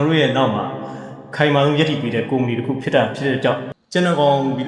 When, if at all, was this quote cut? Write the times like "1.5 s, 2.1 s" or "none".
3.7 s